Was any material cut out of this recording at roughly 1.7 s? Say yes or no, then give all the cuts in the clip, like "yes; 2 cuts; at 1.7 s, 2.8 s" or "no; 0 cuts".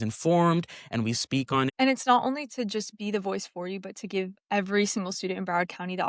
yes; 1 cut; at 1.7 s